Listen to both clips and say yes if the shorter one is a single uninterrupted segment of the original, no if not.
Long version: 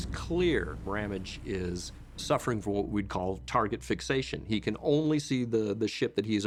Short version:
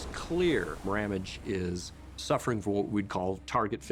yes